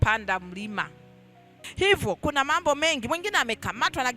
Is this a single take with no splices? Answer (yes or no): no